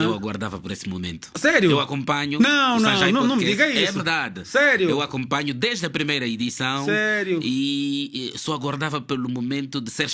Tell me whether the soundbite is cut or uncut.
uncut